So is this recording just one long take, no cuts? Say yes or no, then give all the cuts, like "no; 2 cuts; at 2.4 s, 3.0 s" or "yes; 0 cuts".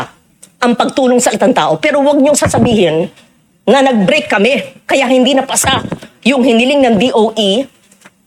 yes; 0 cuts